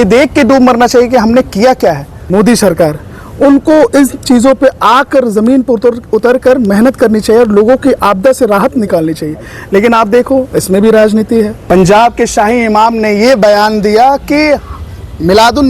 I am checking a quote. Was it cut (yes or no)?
yes